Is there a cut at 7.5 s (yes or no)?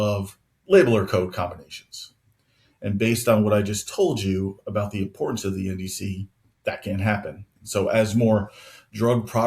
yes